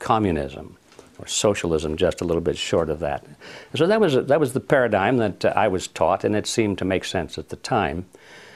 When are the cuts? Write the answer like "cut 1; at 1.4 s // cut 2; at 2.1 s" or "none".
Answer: cut 1; at 7.2 s